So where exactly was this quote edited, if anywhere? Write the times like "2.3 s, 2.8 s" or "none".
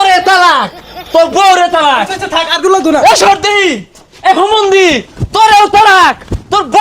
none